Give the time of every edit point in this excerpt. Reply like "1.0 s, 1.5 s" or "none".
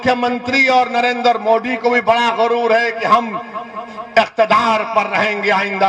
none